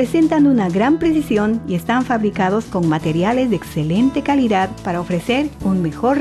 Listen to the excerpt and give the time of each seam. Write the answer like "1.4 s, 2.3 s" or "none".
none